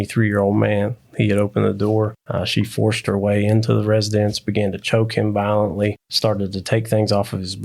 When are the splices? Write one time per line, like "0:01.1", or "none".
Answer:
0:02.2
0:06.1

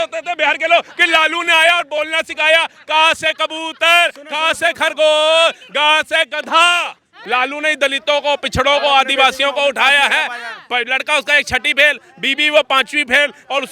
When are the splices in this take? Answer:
0:07.2

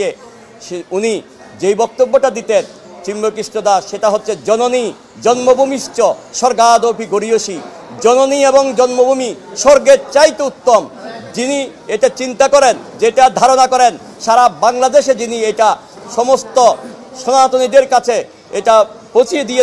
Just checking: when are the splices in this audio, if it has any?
none

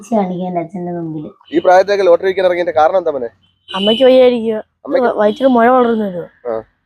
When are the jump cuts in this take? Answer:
0:01.4
0:05.0

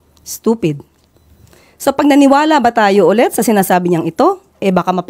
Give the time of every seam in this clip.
none

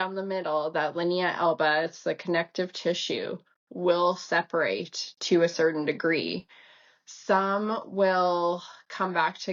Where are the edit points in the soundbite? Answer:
none

